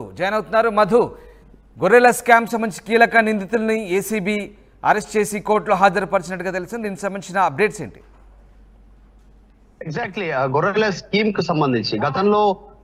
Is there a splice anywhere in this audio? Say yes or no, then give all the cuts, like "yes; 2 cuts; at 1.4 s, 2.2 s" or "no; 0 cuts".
no; 0 cuts